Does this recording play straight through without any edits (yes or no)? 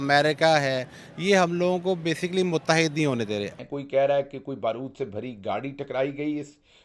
no